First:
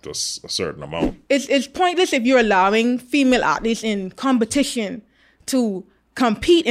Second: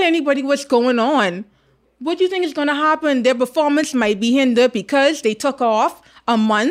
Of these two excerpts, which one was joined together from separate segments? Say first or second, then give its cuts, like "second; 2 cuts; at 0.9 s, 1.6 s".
first; 1 cut; at 1.1 s